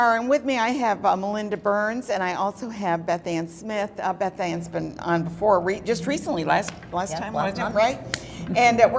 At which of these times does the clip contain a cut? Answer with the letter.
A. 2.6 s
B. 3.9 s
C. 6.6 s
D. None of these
D